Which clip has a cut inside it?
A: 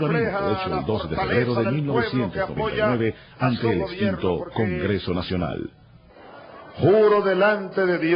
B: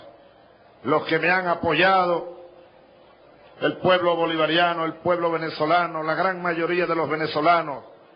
A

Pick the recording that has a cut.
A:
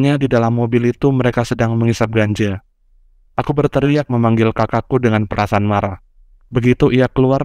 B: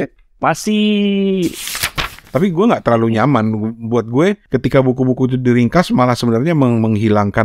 B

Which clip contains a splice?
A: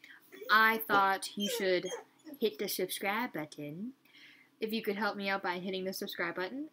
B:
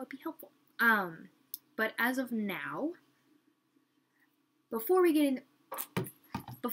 B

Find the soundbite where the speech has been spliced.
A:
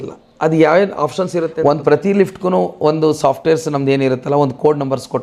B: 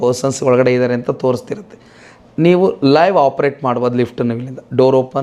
A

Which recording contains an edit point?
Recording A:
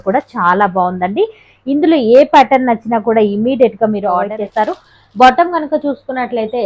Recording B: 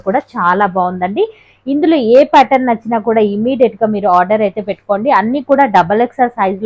A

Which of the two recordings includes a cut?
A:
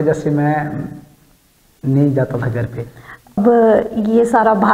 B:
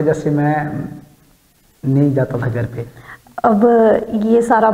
A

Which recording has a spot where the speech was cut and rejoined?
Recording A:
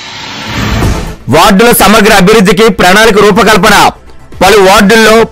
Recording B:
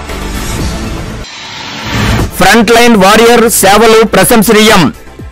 B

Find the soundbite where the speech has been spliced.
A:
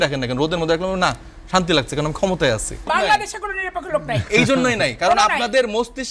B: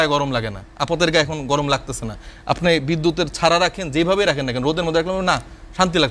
A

